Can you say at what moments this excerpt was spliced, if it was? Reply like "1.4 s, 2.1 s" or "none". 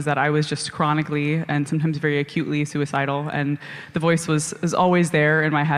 none